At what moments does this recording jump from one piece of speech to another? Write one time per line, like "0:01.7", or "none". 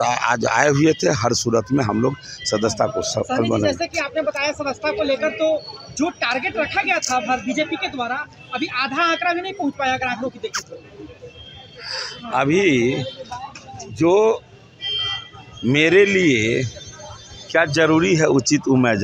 none